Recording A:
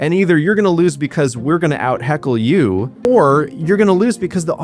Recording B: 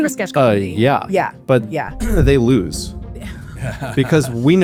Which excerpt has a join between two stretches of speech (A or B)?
A